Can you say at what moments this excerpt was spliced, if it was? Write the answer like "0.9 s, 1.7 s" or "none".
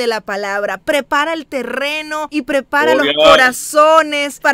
2.3 s